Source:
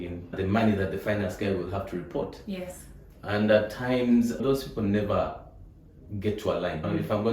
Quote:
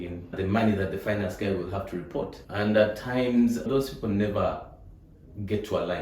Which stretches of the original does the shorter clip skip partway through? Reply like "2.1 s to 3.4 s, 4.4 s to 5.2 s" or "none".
2.4 s to 3.1 s

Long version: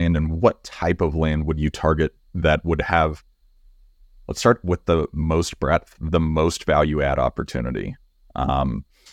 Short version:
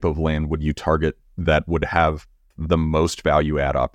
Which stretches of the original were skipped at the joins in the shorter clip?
3.5 s to 6.0 s

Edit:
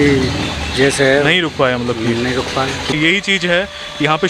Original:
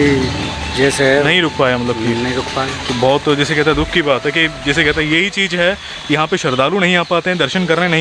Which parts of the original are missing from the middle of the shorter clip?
3.0 s to 5.0 s

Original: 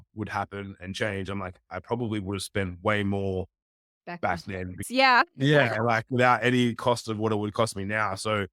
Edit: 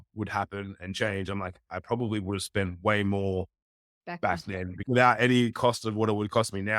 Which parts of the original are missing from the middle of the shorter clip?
4.8 s to 6.1 s

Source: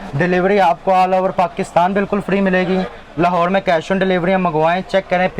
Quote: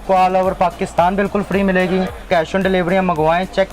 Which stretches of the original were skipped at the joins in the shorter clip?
3.0 s to 3.6 s

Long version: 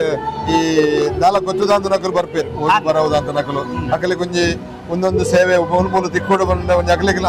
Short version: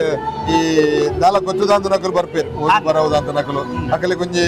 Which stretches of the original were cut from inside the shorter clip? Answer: none

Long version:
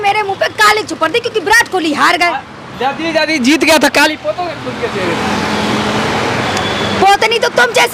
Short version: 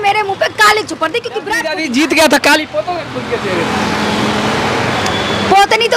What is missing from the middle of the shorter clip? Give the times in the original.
1.6 s to 3.1 s

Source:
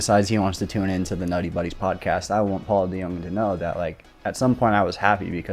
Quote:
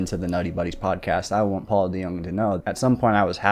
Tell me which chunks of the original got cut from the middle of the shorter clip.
3.6 s to 4.2 s

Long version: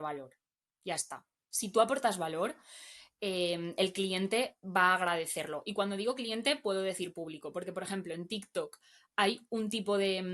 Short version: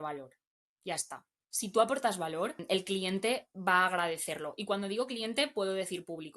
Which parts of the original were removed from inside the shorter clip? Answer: 2.6 s to 3.7 s

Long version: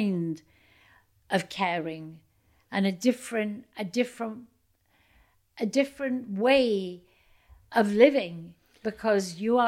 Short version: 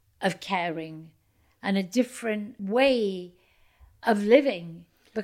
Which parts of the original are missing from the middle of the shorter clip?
3.7 s to 6.3 s

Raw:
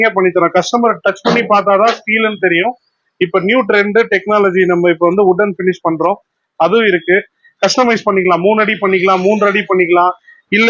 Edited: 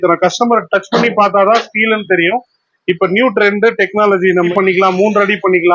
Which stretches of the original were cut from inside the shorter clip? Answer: 4.8 s to 8.8 s

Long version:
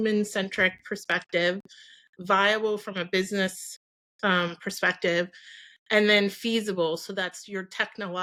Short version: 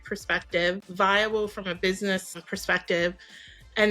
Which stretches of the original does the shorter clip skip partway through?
1.7 s to 2.2 s, 3.8 s to 4.6 s

